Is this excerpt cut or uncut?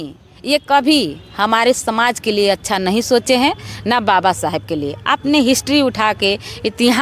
uncut